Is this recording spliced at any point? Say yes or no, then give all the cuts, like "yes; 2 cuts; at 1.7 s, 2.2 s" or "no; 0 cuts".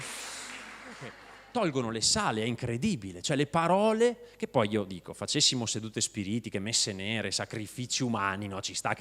yes; 1 cut; at 1.3 s